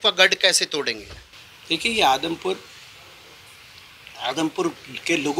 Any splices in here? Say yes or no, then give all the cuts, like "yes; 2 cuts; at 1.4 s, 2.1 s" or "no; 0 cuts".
no; 0 cuts